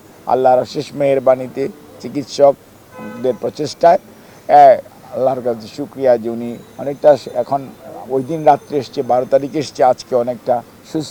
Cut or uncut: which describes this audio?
uncut